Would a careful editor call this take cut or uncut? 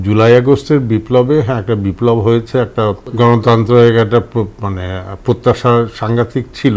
cut